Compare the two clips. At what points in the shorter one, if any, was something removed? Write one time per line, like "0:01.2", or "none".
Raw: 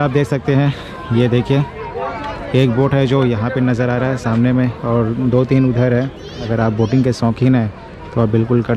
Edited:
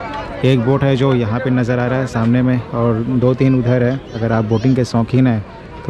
0:04.1